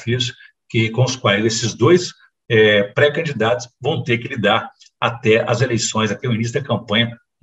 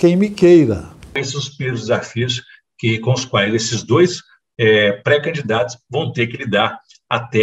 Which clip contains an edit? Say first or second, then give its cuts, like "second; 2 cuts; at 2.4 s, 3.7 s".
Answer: second; 1 cut; at 1.2 s